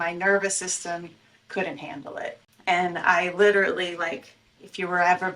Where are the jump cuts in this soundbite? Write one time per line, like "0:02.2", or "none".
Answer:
0:02.4